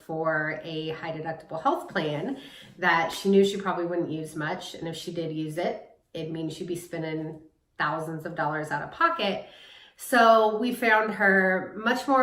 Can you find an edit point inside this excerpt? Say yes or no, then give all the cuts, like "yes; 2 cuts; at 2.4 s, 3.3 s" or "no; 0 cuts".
no; 0 cuts